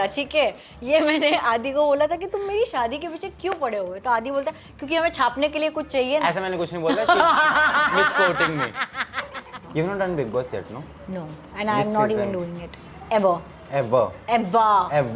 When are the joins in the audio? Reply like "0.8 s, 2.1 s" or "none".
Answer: 9.6 s